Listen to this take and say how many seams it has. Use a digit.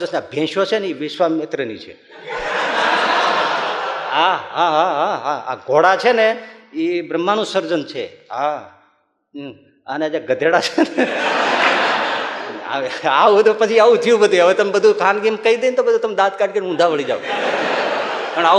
0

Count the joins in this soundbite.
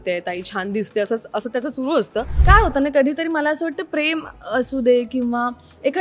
1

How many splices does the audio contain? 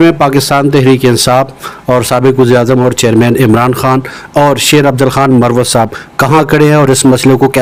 0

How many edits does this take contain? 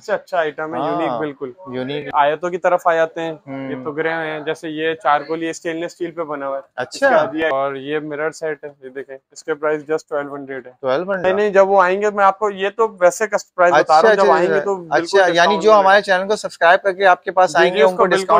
3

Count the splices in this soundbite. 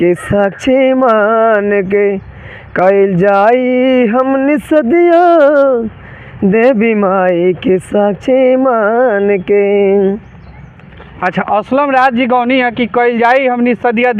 0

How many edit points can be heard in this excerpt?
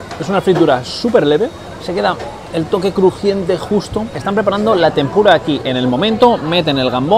1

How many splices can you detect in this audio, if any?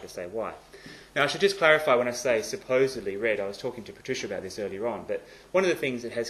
1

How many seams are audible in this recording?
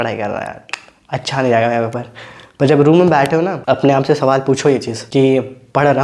0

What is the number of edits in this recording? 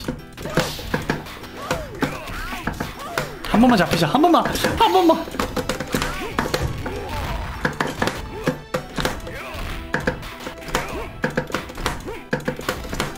0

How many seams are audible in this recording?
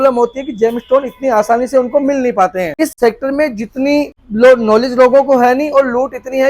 2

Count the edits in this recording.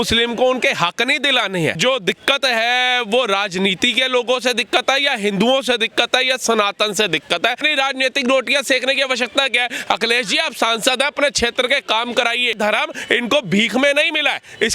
3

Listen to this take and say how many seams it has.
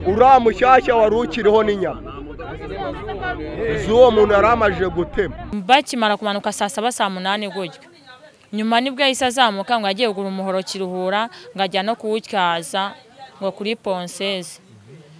1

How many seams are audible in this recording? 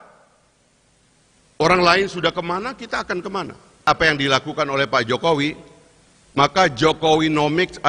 1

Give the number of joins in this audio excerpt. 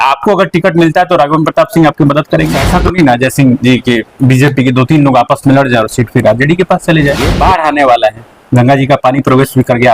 2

